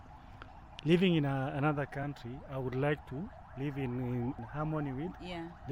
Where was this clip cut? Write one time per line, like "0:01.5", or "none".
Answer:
0:04.4